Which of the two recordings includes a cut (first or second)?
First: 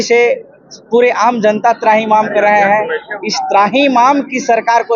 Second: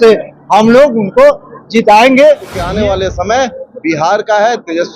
second